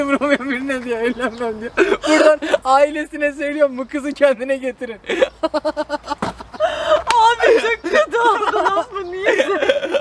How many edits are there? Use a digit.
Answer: 0